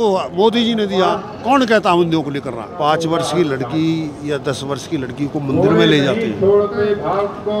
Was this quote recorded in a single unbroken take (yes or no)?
no